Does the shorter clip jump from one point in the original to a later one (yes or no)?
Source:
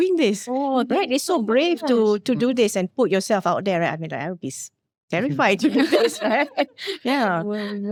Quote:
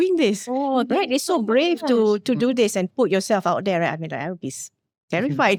no